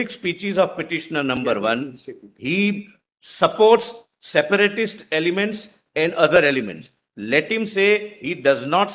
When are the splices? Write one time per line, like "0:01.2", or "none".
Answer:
none